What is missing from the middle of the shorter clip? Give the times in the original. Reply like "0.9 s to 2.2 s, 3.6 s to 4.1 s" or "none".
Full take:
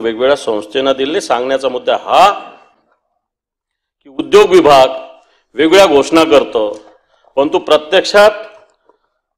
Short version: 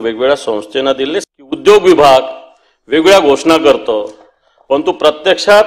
1.2 s to 3.9 s